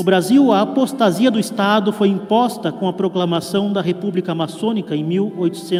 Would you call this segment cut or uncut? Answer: uncut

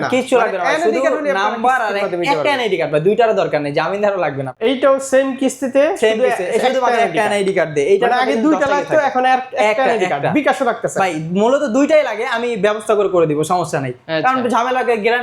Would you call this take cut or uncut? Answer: cut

